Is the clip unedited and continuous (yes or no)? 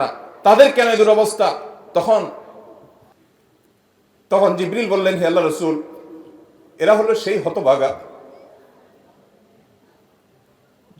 no